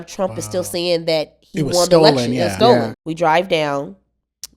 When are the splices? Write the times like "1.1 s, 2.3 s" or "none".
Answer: 3.0 s